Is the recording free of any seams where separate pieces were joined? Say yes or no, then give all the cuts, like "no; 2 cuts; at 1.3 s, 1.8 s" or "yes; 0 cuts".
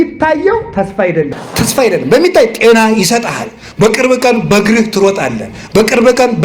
no; 1 cut; at 1.4 s